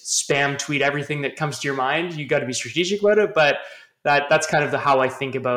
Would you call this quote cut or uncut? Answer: uncut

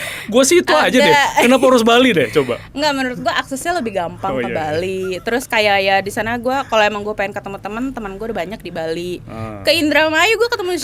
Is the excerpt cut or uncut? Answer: uncut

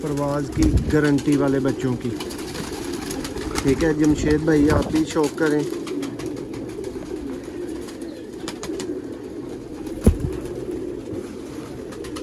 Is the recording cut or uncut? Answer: uncut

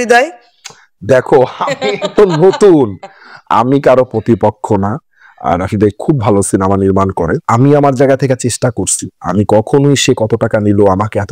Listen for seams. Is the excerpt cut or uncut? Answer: uncut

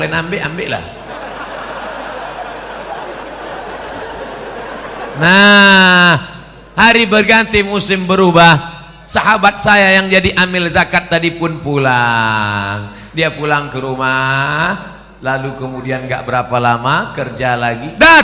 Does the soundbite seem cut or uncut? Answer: cut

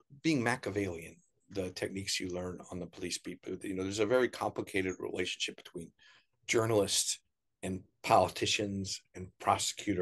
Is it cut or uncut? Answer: uncut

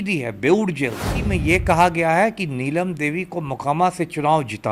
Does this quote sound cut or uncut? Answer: cut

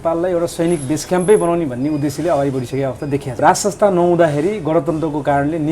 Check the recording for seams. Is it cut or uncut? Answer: cut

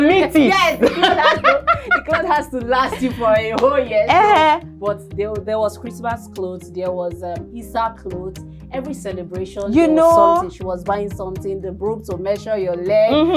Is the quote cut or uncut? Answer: uncut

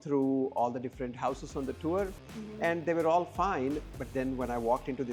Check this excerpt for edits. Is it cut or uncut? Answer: uncut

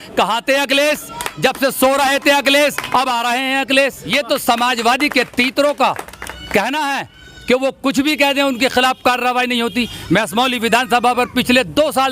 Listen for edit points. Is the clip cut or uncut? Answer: cut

